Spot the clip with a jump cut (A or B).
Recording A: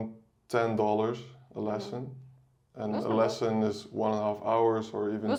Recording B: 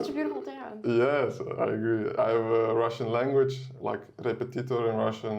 B